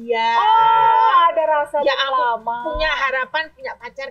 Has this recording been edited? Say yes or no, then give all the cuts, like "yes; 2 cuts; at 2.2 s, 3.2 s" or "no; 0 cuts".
no; 0 cuts